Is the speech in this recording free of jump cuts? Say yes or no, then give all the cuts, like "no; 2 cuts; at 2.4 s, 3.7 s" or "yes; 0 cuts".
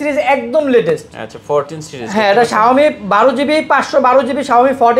yes; 0 cuts